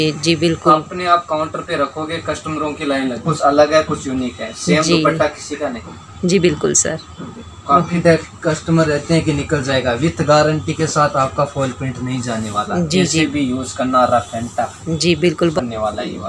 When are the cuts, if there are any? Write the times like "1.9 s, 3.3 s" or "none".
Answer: 3.2 s, 8.0 s, 15.6 s